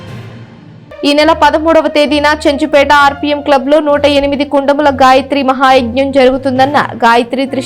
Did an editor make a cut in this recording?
yes; 1 cut; at 1.0 s

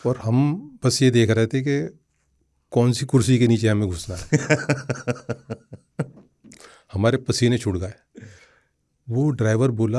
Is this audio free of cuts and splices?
yes; 0 cuts

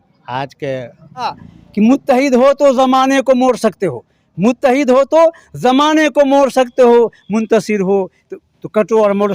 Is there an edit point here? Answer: yes; 1 cut; at 1.4 s

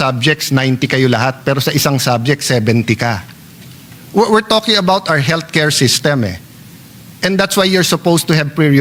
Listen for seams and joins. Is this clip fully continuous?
yes; 0 cuts

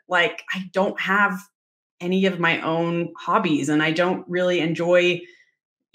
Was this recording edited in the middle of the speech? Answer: no; 0 cuts

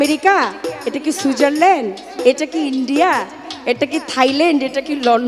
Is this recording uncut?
yes; 0 cuts

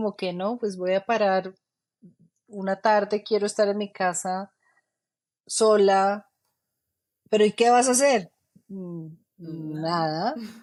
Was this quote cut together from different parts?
no; 0 cuts

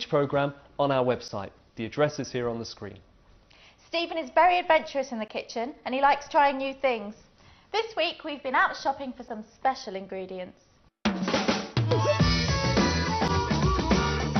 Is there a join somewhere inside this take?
no; 0 cuts

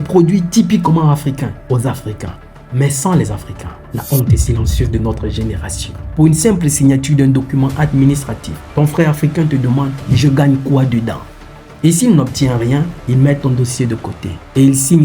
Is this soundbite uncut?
no; 1 cut; at 6.1 s

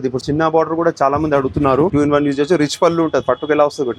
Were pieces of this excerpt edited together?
yes; 1 cut; at 1.9 s

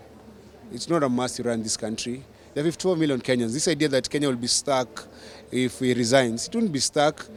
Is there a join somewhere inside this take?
no; 0 cuts

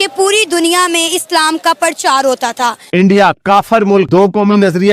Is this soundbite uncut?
no; 1 cut; at 2.8 s

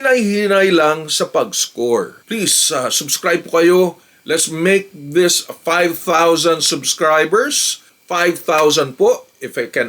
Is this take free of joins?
no; 2 cuts; at 2.2 s, 7.9 s

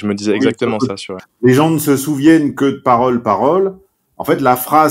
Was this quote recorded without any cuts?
no; 1 cut; at 1.2 s

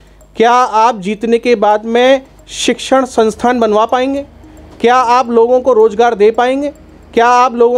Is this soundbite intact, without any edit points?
yes; 0 cuts

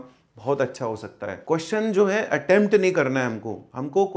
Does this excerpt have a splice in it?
yes; 1 cut; at 1.3 s

